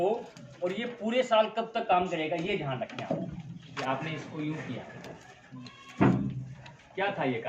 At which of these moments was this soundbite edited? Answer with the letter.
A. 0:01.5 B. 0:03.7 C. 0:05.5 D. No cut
B